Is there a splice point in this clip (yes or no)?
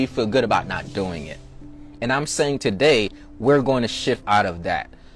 no